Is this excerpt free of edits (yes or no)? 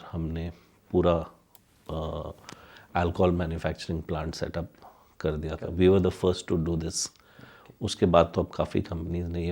yes